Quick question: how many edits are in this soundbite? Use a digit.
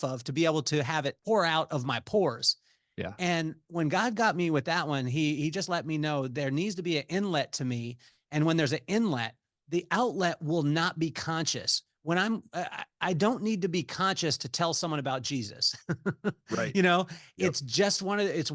1